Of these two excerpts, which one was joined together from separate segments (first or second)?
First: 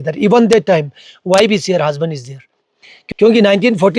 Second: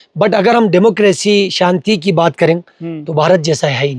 first